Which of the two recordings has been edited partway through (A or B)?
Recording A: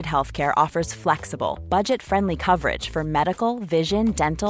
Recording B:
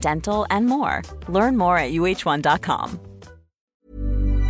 B